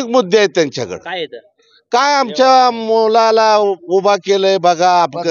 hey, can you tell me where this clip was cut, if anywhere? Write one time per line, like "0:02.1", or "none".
none

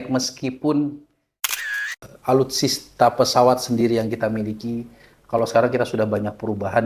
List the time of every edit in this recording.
0:01.6

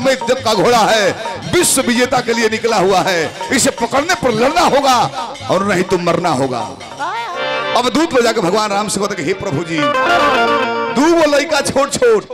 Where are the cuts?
0:07.2

